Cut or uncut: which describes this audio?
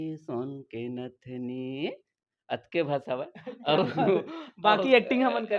uncut